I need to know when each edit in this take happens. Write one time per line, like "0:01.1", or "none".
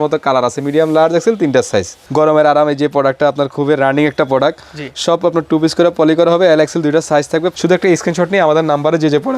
0:02.0
0:07.5